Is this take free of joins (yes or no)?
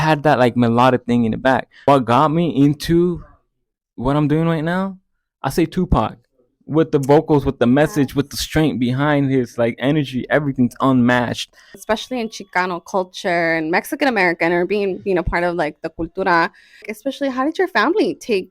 no